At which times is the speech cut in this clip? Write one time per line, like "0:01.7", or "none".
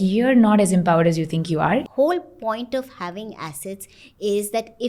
0:01.9